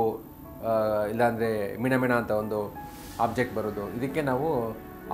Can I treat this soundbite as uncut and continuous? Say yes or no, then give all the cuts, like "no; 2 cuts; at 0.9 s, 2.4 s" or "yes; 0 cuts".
yes; 0 cuts